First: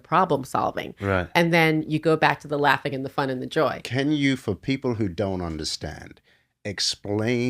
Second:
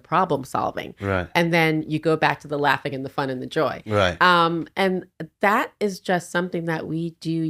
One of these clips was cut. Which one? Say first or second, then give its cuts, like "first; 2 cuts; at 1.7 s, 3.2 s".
first; 1 cut; at 3.8 s